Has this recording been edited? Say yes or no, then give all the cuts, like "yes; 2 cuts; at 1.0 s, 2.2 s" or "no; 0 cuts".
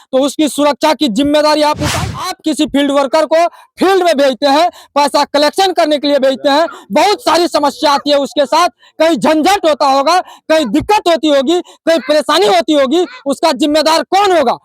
yes; 1 cut; at 1.8 s